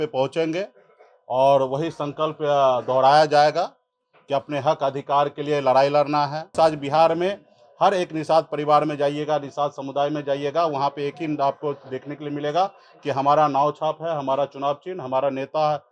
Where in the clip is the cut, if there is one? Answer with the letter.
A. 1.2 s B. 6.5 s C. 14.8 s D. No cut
B